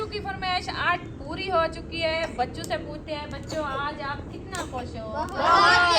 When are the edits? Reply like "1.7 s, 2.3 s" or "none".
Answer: 2.2 s